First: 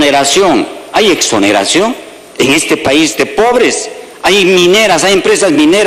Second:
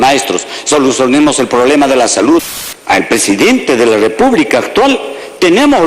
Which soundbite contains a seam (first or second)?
second